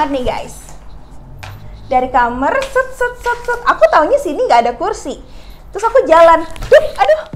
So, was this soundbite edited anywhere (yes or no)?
no